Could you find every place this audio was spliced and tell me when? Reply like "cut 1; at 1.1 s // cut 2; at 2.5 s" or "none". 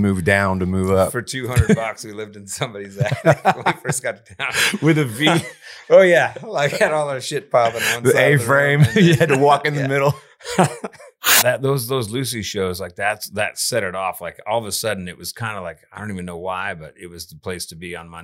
cut 1; at 11.4 s